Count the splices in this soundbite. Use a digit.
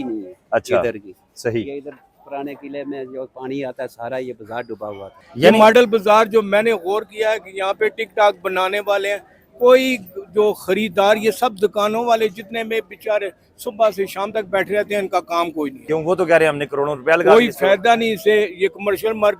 2